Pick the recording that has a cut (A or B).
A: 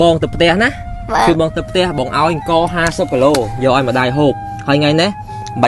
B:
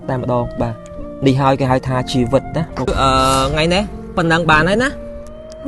B